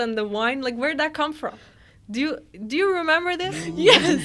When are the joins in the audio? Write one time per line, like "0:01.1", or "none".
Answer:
none